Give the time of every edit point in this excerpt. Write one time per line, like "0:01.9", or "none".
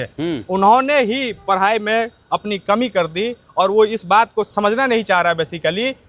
0:04.5